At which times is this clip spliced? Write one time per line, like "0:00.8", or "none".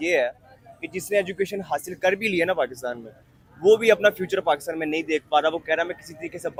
none

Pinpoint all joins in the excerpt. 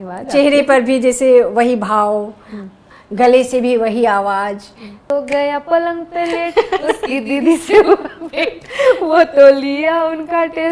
0:05.1

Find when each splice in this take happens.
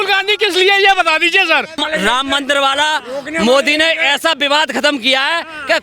0:01.8

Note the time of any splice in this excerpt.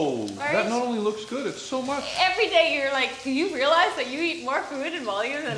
0:02.1

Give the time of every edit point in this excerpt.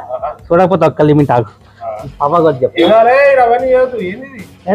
none

